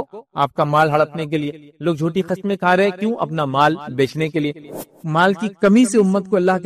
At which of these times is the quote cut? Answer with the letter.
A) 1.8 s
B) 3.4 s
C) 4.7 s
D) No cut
C